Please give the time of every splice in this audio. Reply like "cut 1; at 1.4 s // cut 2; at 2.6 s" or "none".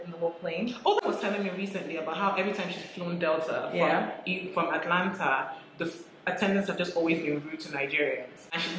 cut 1; at 1.0 s